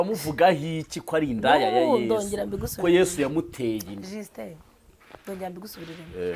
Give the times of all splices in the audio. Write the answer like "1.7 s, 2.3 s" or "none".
none